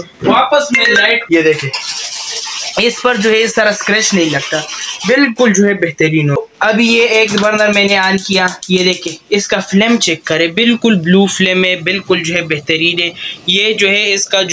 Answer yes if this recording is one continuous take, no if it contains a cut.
no